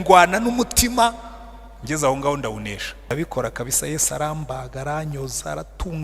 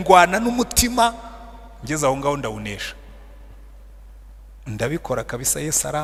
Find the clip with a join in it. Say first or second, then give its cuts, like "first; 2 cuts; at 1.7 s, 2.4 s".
first; 1 cut; at 3.1 s